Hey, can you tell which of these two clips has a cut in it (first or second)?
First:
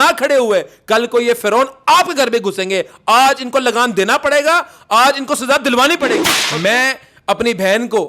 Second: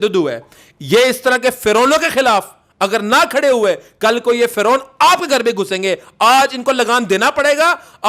first